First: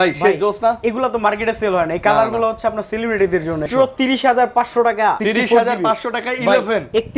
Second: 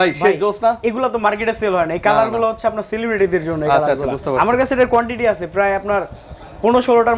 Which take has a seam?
first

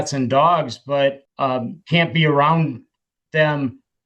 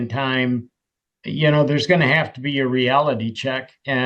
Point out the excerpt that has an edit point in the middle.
first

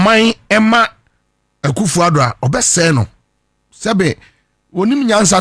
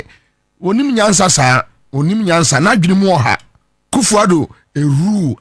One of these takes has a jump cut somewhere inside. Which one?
second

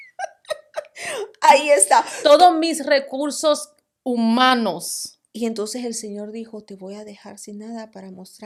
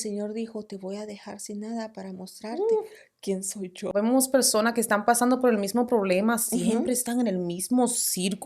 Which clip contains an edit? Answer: second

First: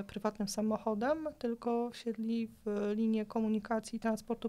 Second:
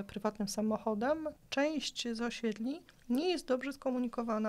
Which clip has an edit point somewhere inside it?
second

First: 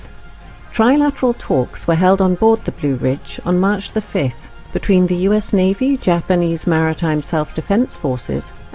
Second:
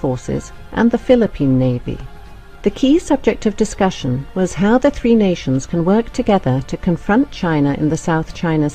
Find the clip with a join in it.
second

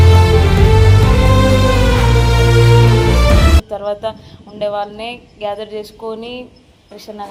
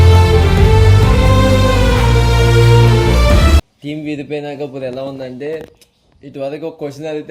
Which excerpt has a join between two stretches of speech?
second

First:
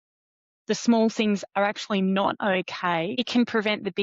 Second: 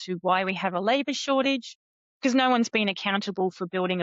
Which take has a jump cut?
first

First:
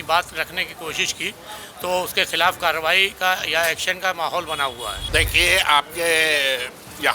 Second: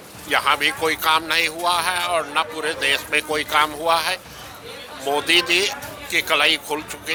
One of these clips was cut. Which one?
first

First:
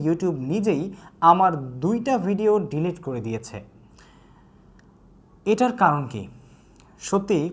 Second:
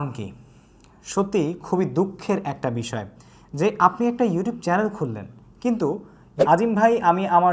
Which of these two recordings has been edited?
second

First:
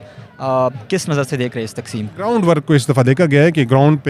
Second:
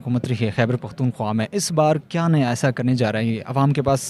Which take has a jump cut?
first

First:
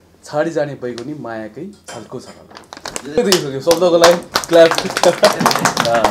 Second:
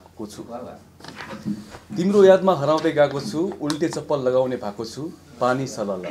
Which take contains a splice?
first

